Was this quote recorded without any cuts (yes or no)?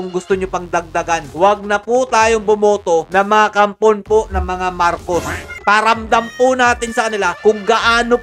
yes